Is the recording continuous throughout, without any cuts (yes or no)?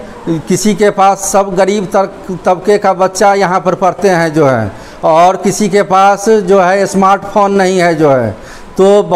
yes